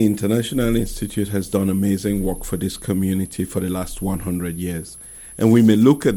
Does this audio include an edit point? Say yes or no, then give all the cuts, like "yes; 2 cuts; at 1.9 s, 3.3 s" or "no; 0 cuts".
no; 0 cuts